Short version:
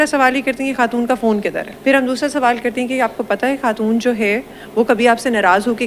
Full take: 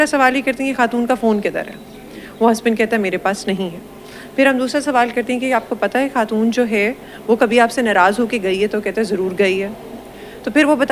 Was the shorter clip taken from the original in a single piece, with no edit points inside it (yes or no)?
no